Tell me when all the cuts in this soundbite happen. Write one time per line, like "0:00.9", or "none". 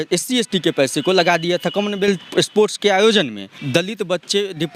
0:02.2
0:03.6